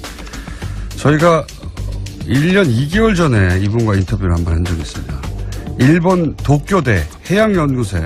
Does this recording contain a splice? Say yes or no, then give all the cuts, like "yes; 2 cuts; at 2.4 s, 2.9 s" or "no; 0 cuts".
no; 0 cuts